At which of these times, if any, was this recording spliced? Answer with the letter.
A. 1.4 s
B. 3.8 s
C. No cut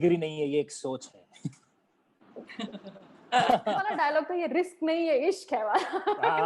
B